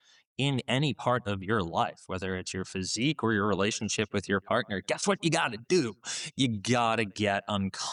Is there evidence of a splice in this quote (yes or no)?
no